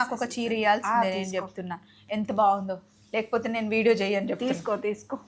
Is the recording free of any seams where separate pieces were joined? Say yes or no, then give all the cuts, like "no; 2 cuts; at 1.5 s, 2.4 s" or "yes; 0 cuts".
yes; 0 cuts